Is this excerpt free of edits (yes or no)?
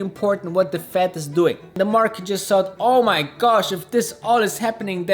no